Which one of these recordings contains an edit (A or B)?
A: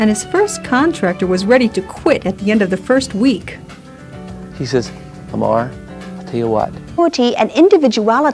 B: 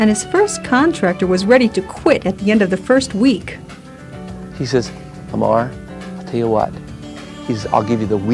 B